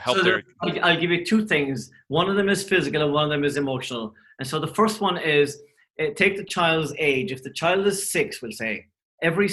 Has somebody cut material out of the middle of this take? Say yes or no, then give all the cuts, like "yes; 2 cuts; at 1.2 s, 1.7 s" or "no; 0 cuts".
no; 0 cuts